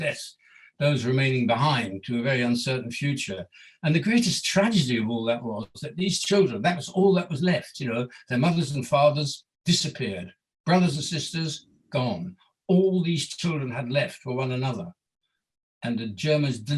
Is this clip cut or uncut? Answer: uncut